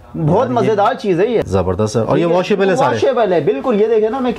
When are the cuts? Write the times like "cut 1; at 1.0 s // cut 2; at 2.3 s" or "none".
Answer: cut 1; at 1.4 s